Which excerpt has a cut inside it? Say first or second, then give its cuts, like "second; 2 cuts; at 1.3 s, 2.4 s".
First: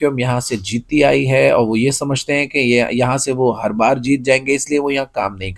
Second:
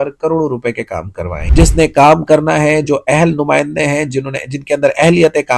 second; 1 cut; at 1.3 s